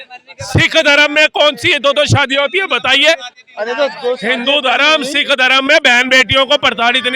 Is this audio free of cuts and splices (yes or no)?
yes